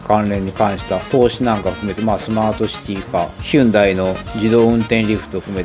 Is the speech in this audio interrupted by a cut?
yes; 1 cut; at 1.0 s

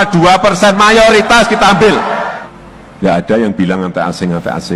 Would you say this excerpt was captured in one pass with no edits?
no; 1 cut; at 2.3 s

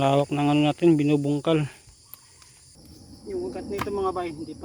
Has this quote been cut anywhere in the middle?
yes; 1 cut; at 2.7 s

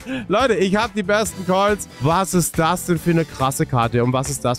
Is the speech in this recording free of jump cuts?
no; 1 cut; at 1.9 s

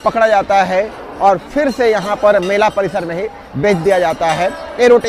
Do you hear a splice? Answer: no; 0 cuts

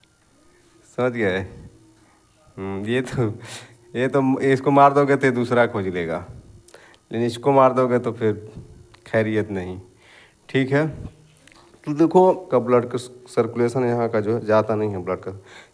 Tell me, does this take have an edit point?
yes; 1 cut; at 12.4 s

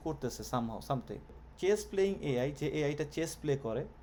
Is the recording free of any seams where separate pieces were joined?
yes; 0 cuts

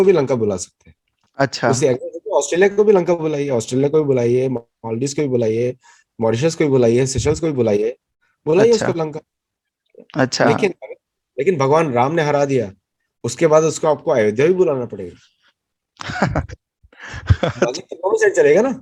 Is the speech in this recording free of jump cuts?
yes; 0 cuts

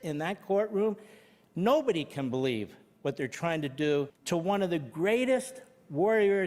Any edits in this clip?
yes; 1 cut; at 4.2 s

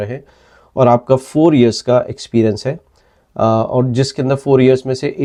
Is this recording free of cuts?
yes; 0 cuts

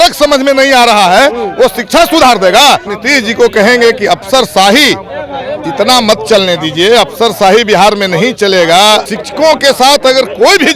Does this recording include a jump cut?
yes; 2 cuts; at 2.9 s, 9.1 s

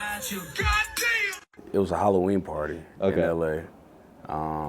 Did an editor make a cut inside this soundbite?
yes; 1 cut; at 1.4 s

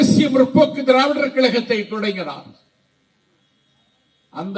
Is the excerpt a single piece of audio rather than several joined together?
yes; 0 cuts

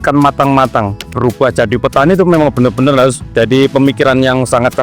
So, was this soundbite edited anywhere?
yes; 1 cut; at 1.1 s

